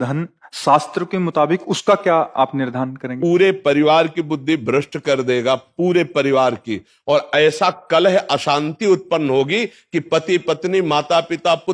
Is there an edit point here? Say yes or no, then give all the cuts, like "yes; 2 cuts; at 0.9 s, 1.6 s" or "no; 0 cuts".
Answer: no; 0 cuts